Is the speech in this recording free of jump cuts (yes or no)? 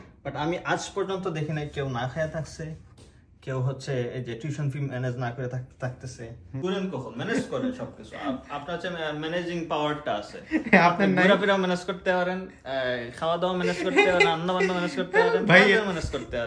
no